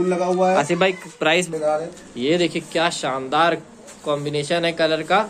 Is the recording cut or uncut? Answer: cut